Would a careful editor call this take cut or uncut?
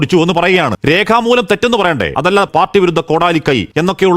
cut